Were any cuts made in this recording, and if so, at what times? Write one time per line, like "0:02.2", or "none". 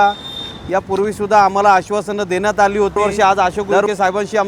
0:03.0

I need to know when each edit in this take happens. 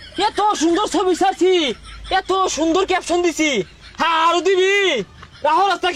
none

